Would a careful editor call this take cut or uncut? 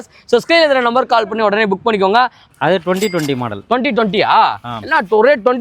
cut